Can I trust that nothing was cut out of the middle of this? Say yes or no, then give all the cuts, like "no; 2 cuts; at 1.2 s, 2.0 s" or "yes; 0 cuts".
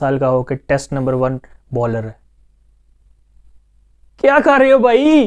yes; 0 cuts